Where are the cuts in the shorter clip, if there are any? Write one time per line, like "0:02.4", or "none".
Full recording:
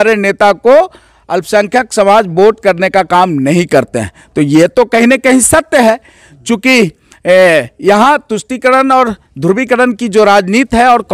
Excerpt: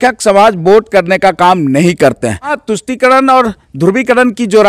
0:02.6